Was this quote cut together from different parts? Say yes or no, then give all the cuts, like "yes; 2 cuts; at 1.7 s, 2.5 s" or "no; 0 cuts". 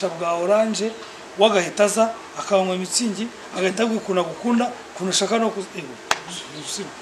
no; 0 cuts